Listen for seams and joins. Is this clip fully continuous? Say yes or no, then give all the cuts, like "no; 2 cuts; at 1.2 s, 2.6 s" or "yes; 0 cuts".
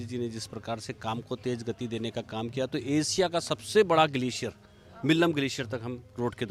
yes; 0 cuts